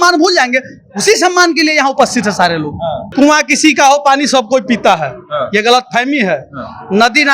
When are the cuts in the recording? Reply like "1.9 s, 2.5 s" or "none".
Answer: 3.0 s